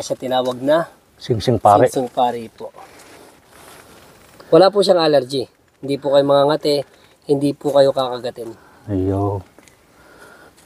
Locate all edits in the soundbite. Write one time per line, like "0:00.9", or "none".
none